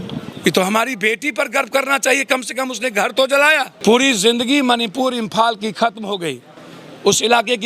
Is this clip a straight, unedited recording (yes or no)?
no